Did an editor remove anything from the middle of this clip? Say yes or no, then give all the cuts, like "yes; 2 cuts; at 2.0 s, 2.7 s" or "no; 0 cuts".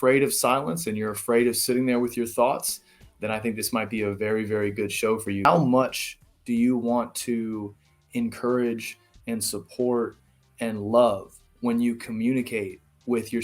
yes; 1 cut; at 5.4 s